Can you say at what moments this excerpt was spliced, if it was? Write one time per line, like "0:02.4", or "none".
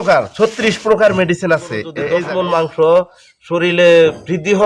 0:01.9